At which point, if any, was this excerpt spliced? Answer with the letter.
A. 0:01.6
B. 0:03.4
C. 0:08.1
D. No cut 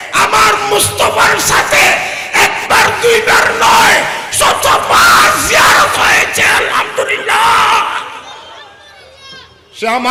D